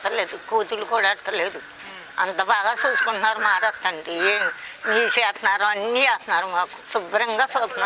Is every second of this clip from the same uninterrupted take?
no; 1 cut; at 6.8 s

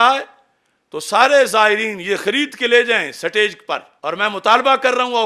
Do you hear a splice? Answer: yes; 1 cut; at 3.9 s

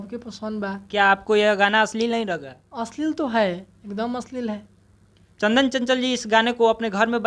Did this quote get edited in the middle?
yes; 1 cut; at 5.2 s

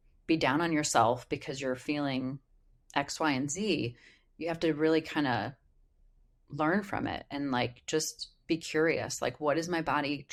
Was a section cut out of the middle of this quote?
no; 0 cuts

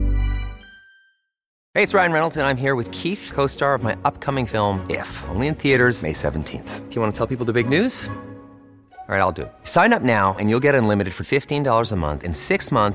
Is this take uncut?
no; 1 cut; at 1.5 s

